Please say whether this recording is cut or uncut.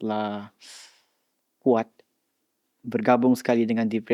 uncut